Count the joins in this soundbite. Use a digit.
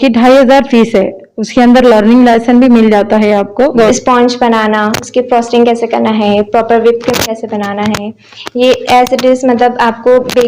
1